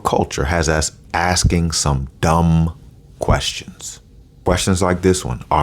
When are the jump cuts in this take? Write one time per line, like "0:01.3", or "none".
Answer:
0:04.5

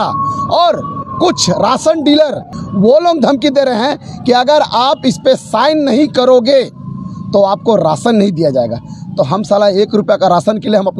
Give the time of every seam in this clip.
0:02.5

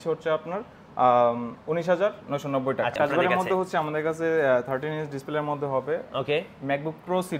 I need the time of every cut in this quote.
0:02.9

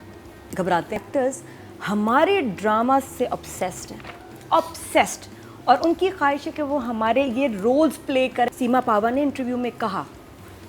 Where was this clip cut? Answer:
0:01.0
0:08.5

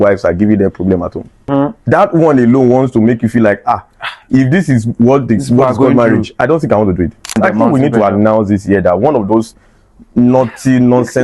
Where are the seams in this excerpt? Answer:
0:01.5
0:07.4

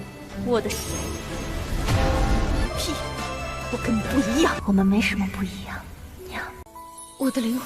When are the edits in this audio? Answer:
0:04.6

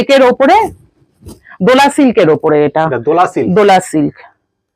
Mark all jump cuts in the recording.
none

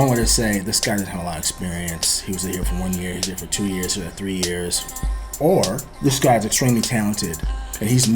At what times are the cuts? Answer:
0:05.2
0:05.9

